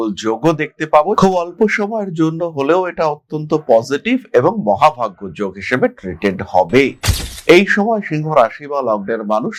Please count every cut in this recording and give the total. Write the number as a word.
zero